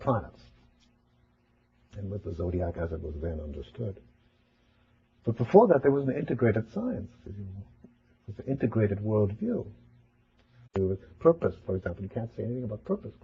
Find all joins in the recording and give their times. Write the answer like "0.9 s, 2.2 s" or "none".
none